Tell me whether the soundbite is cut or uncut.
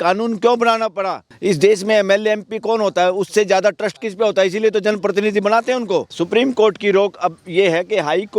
cut